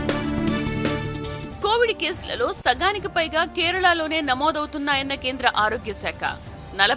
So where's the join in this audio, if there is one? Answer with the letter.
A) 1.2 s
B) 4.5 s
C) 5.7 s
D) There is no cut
D